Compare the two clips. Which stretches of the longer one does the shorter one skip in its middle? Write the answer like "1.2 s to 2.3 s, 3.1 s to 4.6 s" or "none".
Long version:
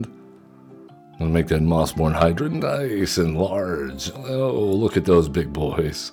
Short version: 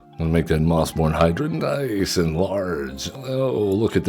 none